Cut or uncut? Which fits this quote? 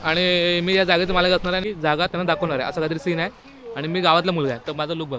cut